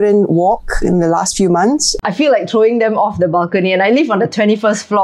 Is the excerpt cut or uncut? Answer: cut